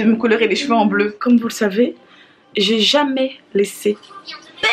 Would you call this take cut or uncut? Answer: cut